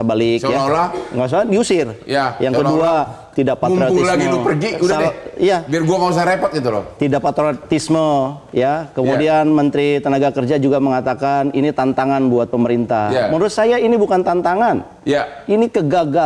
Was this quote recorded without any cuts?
yes; 0 cuts

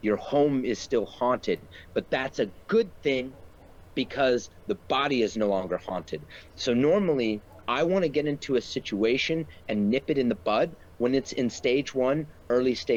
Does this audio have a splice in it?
no; 0 cuts

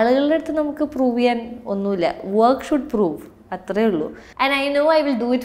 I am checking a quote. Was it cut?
yes; 1 cut; at 4.2 s

